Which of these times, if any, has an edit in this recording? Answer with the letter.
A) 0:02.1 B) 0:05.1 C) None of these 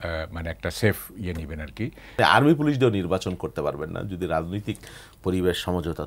A